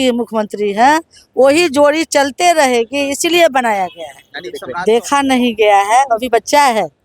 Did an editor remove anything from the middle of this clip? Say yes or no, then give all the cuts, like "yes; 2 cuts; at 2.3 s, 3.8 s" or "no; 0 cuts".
yes; 1 cut; at 4.6 s